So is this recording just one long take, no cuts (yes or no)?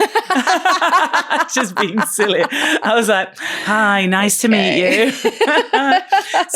yes